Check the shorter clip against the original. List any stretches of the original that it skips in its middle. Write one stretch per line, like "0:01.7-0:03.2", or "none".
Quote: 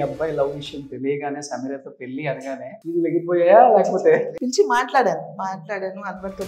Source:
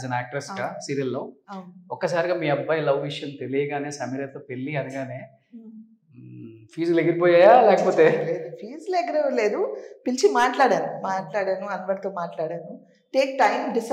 0:05.3-0:06.7
0:08.3-0:10.0